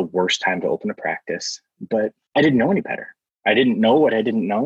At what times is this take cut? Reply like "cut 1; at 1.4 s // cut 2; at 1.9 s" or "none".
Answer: cut 1; at 2.2 s